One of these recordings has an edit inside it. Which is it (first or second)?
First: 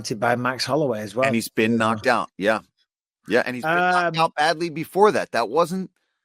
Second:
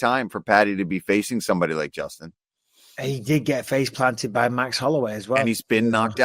second